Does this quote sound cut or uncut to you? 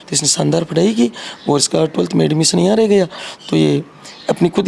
uncut